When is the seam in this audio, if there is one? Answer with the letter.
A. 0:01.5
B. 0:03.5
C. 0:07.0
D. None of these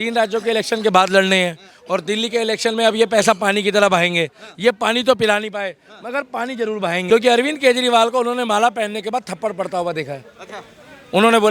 C